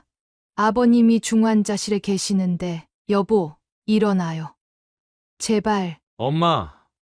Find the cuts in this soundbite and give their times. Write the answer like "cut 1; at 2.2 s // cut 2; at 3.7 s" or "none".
cut 1; at 2.9 s // cut 2; at 6.0 s